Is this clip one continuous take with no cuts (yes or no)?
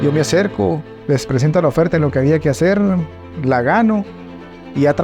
no